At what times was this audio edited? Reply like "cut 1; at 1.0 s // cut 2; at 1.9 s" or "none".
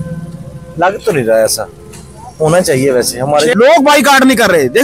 cut 1; at 3.5 s